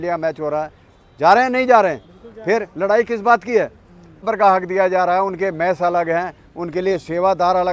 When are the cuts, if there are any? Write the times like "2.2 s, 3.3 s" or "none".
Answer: 4.3 s

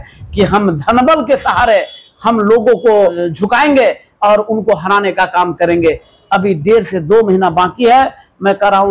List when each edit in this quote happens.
3.2 s, 6.1 s

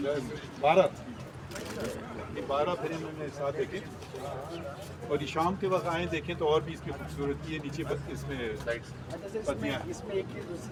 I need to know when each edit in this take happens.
none

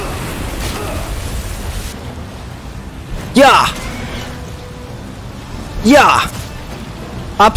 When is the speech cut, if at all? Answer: 1.9 s

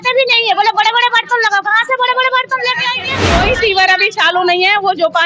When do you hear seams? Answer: 3.1 s

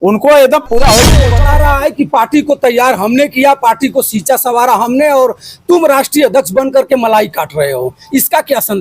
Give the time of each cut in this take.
1.3 s

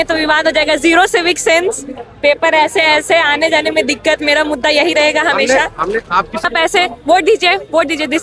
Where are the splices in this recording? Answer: 6.4 s

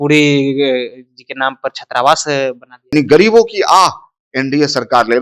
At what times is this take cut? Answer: 2.9 s

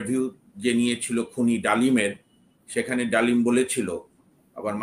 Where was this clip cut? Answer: none

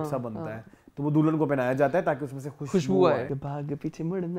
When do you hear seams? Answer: 3.3 s

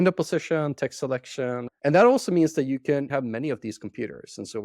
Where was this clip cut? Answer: 1.7 s, 3.1 s

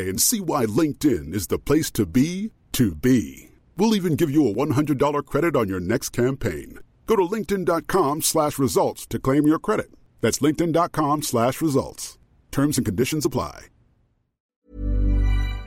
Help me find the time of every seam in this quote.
14.4 s

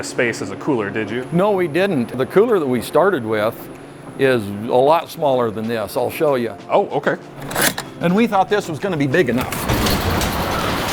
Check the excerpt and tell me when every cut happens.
2.2 s, 7.4 s

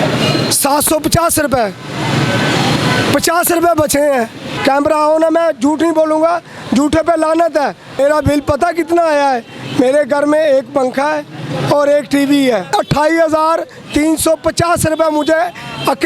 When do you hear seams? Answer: 4.4 s, 8.0 s, 12.7 s

